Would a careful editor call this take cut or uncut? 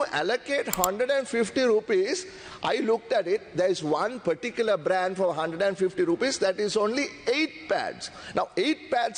uncut